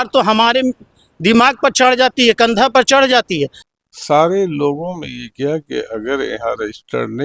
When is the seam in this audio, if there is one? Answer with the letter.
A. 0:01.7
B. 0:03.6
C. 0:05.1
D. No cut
B